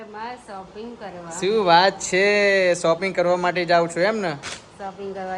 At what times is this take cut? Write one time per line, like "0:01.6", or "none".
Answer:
none